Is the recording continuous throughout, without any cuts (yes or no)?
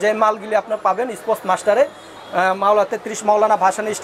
yes